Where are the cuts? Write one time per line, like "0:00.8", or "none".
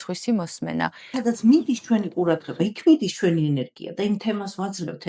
0:01.1